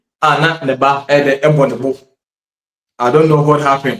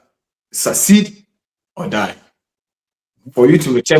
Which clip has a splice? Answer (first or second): first